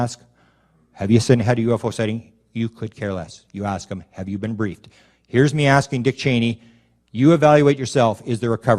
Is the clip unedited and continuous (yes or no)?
no